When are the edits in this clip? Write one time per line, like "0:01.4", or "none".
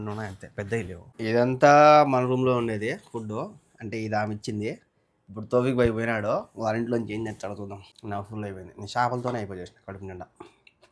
0:01.0
0:07.9

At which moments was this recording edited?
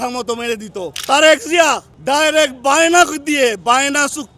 0:00.9
0:01.9

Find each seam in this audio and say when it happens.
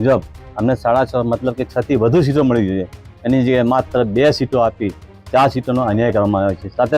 none

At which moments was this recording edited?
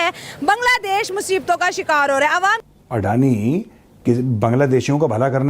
0:02.6

